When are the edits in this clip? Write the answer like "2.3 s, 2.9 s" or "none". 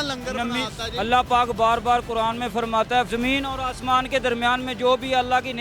3.1 s